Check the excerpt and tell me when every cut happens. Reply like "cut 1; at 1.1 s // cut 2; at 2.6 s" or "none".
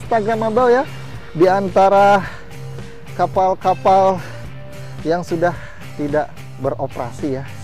cut 1; at 6.4 s